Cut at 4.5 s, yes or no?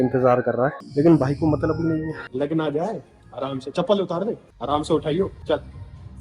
yes